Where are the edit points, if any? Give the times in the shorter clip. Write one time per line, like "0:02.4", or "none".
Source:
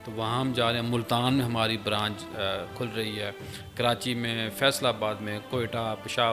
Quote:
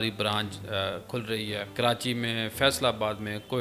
0:01.7